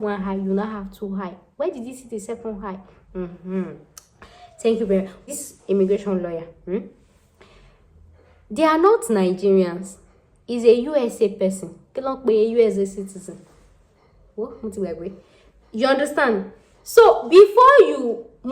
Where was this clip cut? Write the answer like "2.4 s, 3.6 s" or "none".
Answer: 5.2 s

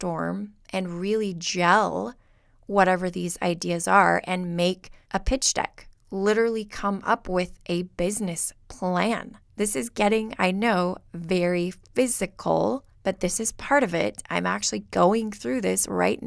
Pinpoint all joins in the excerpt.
4.9 s, 9.4 s, 12.9 s

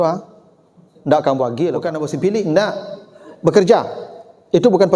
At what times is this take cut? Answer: 1.9 s

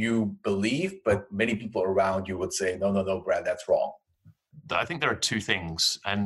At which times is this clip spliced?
4.5 s

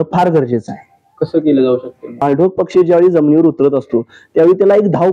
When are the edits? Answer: 2.2 s

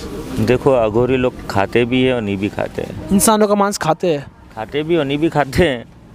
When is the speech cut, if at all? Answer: none

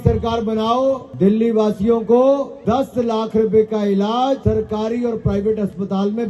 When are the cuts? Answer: 1.1 s, 2.5 s, 4.4 s

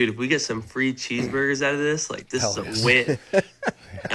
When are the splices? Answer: none

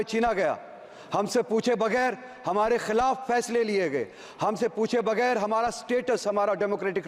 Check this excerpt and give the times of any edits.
none

